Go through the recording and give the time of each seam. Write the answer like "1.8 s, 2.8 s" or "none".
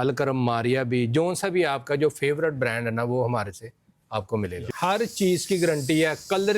4.7 s